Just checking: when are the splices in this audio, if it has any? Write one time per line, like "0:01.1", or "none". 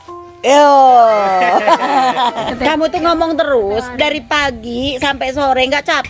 0:02.5